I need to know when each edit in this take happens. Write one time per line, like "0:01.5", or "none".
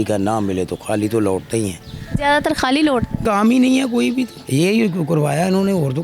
0:03.2
0:04.4